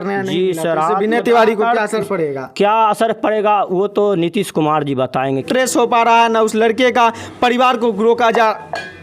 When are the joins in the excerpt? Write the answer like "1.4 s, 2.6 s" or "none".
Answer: 5.5 s